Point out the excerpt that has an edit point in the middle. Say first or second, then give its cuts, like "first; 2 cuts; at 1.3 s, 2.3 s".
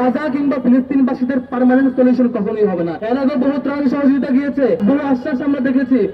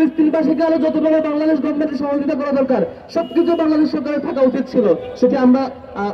first; 2 cuts; at 3.0 s, 4.8 s